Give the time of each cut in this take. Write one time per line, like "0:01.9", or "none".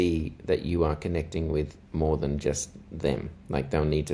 0:01.8